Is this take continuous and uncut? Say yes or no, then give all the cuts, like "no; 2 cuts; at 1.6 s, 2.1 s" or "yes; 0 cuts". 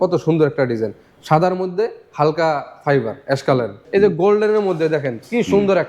no; 1 cut; at 3.8 s